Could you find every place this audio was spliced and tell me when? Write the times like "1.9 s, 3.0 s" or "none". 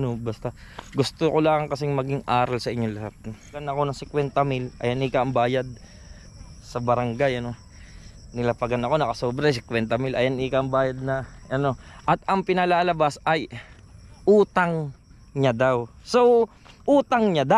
3.7 s